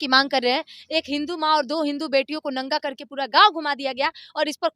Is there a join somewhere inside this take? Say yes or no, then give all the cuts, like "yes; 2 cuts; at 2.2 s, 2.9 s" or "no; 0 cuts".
no; 0 cuts